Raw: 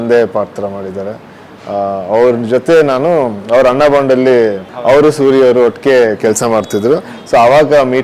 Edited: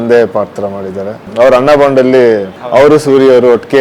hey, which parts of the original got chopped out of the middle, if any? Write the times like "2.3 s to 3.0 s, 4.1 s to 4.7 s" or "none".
1.2 s to 3.4 s